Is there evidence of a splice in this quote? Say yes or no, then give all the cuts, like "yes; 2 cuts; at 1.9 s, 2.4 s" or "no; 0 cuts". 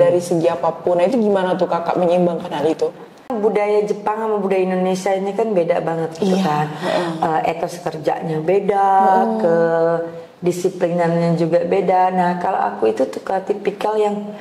yes; 1 cut; at 3.3 s